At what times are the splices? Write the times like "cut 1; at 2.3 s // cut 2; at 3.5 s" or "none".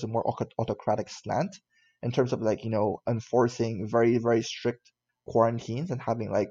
none